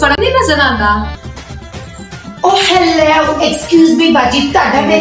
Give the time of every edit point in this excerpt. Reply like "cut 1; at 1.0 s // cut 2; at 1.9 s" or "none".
cut 1; at 1.2 s